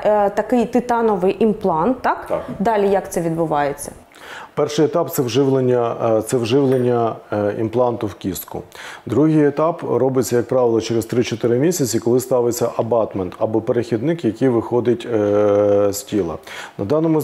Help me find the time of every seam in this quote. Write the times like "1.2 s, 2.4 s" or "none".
none